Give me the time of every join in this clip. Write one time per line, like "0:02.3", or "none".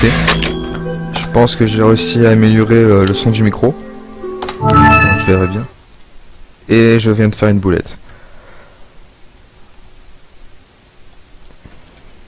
0:05.4